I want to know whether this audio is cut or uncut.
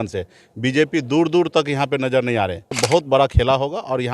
cut